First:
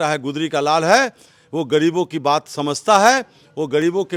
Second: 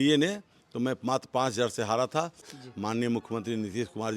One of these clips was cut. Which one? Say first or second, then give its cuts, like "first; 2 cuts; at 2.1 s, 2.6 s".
second; 1 cut; at 2.6 s